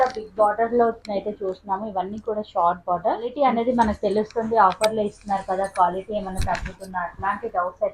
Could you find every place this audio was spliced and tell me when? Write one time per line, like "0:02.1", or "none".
0:03.4

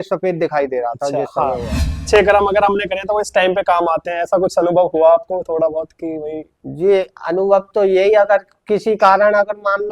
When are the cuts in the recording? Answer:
0:02.0

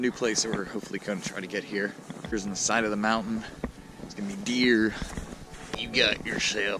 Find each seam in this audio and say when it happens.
0:02.3
0:05.5

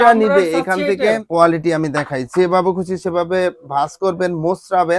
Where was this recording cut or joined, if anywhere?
0:01.2

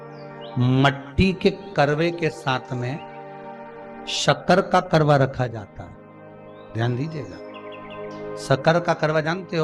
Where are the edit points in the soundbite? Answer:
none

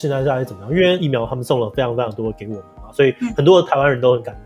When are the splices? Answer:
0:01.0

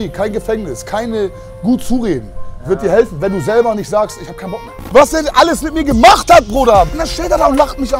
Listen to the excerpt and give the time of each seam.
0:04.7
0:06.9

